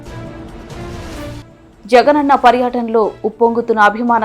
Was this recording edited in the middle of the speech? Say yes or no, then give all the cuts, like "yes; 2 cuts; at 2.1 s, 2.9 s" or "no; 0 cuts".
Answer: yes; 1 cut; at 1.4 s